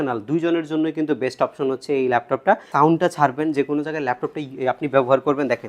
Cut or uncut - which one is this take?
cut